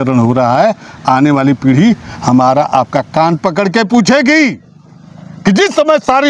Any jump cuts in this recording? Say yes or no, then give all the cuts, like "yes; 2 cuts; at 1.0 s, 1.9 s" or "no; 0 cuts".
no; 0 cuts